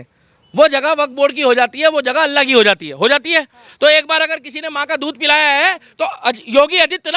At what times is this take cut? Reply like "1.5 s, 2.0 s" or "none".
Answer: none